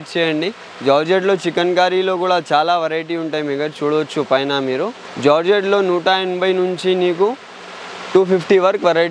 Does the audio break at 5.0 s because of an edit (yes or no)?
yes